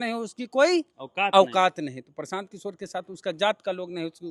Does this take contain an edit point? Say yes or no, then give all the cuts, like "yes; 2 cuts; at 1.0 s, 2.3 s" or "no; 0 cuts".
no; 0 cuts